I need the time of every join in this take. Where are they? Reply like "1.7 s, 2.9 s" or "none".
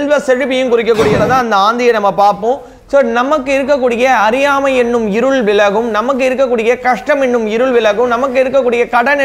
1.2 s